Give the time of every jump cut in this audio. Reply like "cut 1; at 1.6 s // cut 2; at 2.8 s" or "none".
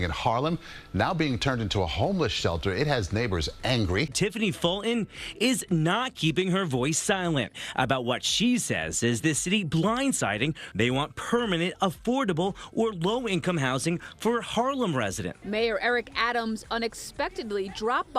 cut 1; at 4.1 s // cut 2; at 10.7 s // cut 3; at 15.3 s